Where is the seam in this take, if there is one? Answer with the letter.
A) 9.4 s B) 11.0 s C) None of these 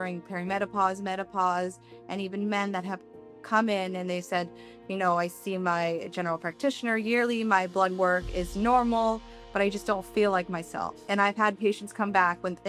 B